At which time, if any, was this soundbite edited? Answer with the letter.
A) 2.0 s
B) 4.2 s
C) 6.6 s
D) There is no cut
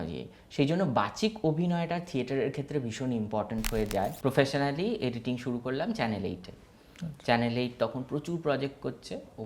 B